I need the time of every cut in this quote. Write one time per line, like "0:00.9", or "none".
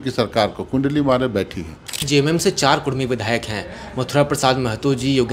0:01.9